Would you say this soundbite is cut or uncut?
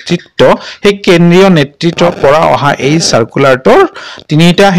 cut